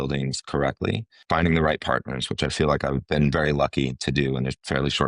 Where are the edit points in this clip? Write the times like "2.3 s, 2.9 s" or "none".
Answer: 1.2 s